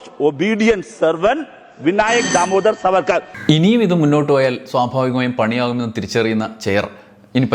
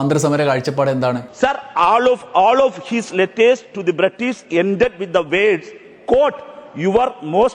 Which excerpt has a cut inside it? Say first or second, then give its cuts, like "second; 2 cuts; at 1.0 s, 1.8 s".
second; 1 cut; at 1.3 s